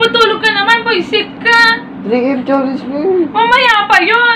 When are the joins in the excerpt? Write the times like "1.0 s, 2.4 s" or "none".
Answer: 1.9 s